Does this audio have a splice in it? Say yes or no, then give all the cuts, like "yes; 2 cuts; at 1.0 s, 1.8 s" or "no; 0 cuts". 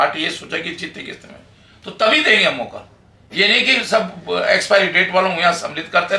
no; 0 cuts